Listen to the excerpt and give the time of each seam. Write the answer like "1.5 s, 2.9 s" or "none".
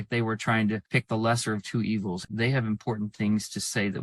2.3 s